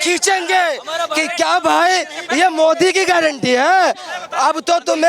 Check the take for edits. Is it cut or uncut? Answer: uncut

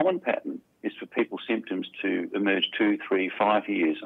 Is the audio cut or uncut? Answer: uncut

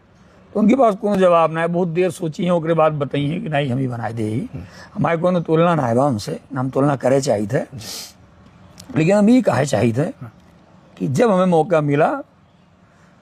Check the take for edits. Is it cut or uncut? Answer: uncut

